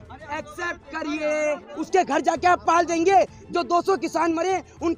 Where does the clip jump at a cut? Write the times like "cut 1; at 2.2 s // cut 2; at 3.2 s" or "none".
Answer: cut 1; at 1.7 s